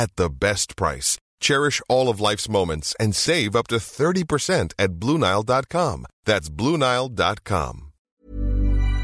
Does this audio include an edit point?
yes; 1 cut; at 8.1 s

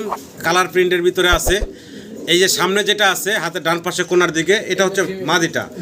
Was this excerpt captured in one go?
yes; 0 cuts

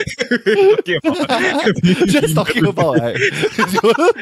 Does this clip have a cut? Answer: no; 0 cuts

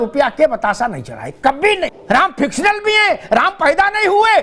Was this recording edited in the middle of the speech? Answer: yes; 1 cut; at 2.0 s

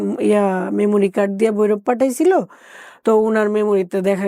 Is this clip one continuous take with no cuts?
yes; 0 cuts

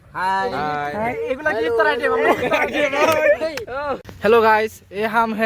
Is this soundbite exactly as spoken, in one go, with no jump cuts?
no; 1 cut; at 4.1 s

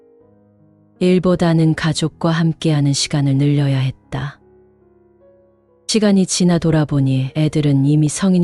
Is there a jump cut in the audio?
yes; 2 cuts; at 4.4 s, 5.9 s

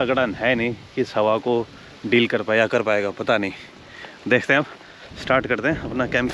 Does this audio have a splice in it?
no; 0 cuts

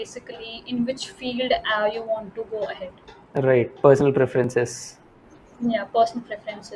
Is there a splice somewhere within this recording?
no; 0 cuts

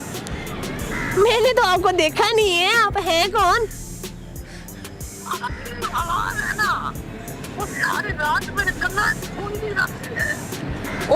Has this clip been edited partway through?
no; 0 cuts

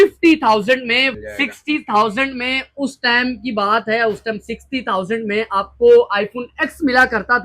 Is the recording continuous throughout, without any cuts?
no; 1 cut; at 1.2 s

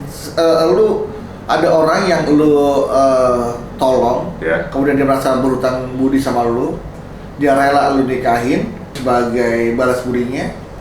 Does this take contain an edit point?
yes; 1 cut; at 9.0 s

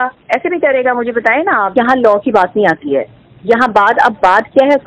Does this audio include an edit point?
yes; 1 cut; at 1.7 s

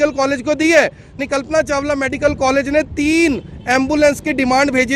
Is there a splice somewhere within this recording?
yes; 1 cut; at 1.1 s

